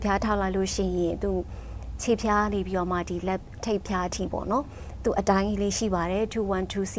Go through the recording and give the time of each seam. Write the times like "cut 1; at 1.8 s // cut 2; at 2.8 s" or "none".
none